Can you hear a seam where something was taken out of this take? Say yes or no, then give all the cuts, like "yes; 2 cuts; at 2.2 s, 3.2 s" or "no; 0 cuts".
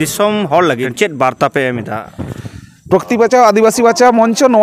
yes; 1 cut; at 0.9 s